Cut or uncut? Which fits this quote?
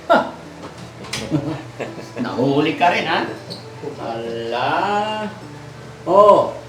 uncut